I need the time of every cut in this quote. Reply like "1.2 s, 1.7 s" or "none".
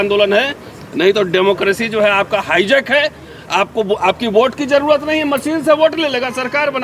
none